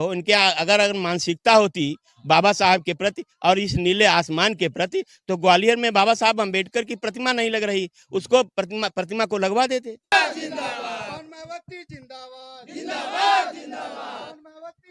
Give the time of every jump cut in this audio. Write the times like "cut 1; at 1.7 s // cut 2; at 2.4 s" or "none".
cut 1; at 10.1 s